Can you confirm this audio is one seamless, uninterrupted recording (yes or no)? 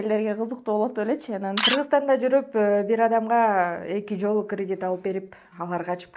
no